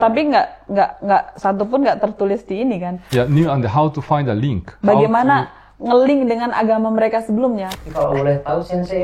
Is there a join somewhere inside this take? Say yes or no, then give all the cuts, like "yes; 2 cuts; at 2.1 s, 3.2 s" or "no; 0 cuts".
yes; 2 cuts; at 3.1 s, 7.7 s